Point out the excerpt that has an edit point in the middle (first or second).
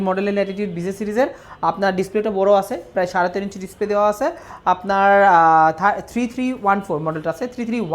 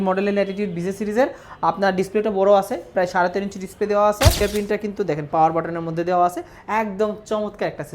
second